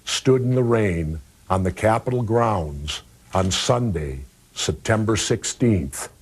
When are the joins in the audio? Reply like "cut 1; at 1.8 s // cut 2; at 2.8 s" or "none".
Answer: cut 1; at 1.9 s